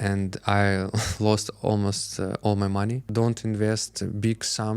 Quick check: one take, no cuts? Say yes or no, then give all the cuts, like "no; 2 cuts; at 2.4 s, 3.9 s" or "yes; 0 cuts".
no; 1 cut; at 3.1 s